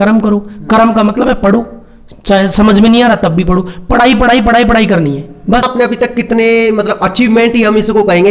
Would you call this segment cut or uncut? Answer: cut